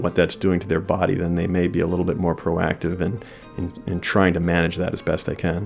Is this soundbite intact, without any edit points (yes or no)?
yes